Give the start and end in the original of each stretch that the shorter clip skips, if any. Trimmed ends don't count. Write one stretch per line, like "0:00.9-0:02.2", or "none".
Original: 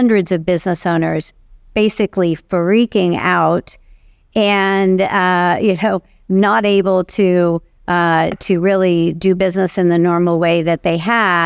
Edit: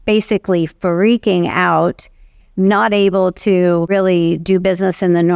0:04.1-0:06.1
0:07.6-0:08.6